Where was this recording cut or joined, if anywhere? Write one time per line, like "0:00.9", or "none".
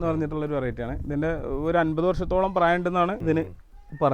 0:03.2